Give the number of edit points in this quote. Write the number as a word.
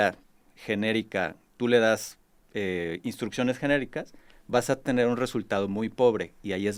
zero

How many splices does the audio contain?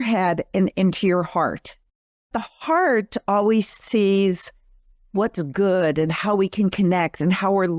one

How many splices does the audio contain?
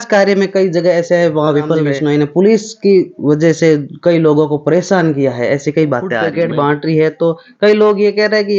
two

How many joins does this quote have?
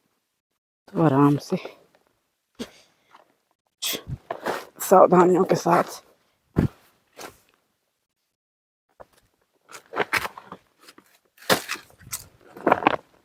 zero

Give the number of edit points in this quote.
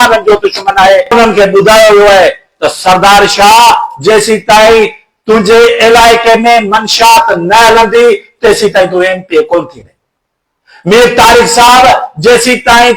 one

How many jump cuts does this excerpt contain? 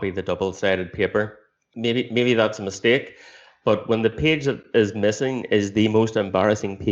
one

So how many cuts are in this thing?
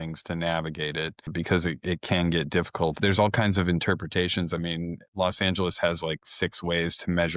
two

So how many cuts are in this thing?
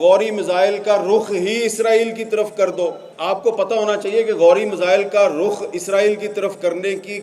one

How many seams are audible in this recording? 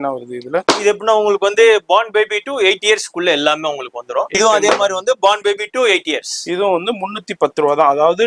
one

